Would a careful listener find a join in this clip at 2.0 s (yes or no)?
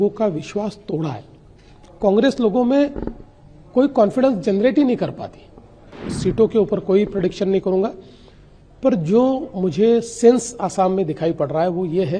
no